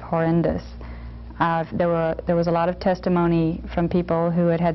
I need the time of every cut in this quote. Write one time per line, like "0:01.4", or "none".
none